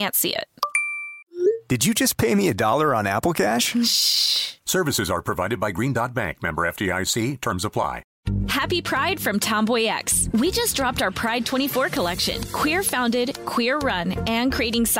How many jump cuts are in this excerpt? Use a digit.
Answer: 1